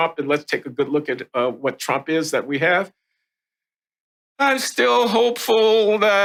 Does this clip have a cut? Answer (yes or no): no